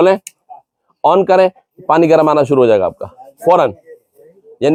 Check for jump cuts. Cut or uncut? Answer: uncut